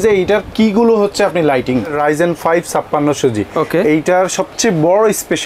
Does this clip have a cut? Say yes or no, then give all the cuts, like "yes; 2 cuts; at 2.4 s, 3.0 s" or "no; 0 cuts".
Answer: yes; 1 cut; at 1.9 s